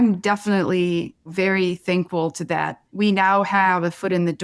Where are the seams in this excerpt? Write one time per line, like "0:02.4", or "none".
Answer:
0:01.3
0:02.8